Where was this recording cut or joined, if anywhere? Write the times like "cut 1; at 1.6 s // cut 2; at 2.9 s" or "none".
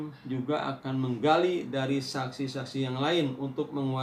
none